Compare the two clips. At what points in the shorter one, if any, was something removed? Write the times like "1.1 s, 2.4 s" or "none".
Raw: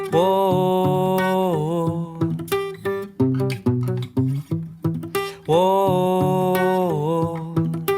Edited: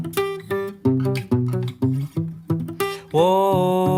none